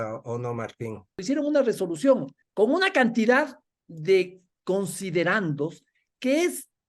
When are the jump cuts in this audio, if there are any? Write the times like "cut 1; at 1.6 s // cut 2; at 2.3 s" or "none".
cut 1; at 1.2 s // cut 2; at 2.4 s // cut 3; at 4.5 s